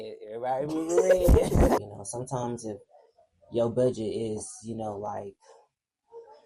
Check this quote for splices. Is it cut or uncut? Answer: cut